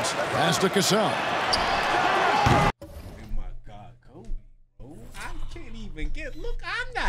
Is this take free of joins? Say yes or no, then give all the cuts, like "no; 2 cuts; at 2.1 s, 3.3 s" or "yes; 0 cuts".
yes; 0 cuts